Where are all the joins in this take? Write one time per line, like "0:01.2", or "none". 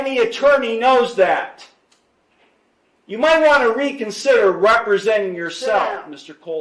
none